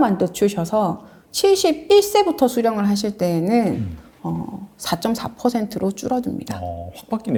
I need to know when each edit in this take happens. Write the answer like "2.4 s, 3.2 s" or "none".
none